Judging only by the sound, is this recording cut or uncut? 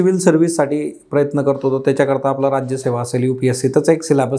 uncut